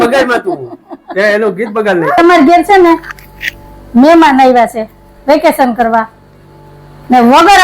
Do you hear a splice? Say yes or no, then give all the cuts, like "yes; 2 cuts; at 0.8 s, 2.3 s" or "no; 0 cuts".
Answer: yes; 1 cut; at 2.2 s